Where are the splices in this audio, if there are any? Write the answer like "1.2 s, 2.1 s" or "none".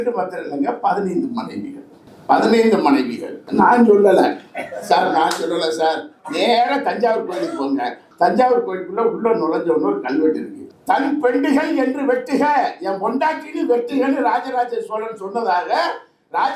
3.4 s